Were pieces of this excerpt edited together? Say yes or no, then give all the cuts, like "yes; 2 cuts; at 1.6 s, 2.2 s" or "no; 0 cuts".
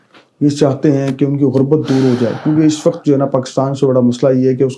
no; 0 cuts